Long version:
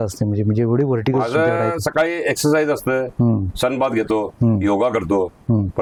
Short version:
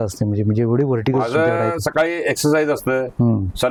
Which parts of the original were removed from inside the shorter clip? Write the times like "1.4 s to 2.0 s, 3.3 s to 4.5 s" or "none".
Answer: none